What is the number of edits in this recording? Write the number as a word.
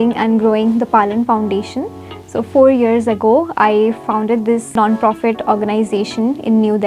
one